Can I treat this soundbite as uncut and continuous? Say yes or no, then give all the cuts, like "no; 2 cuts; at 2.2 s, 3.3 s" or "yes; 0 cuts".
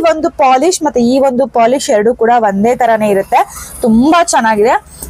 yes; 0 cuts